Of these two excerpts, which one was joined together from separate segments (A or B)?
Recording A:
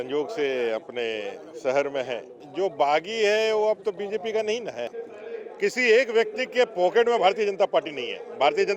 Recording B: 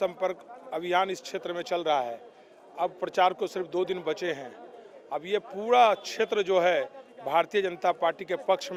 A